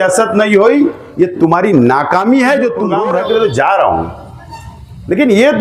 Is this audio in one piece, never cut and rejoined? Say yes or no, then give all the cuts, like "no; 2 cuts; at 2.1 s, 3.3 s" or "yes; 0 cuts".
no; 1 cut; at 2.9 s